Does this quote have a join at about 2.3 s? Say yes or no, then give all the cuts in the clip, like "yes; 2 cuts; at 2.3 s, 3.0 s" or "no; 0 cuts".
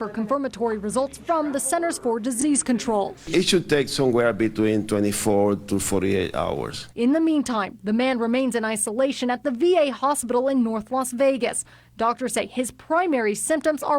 yes; 1 cut; at 2.3 s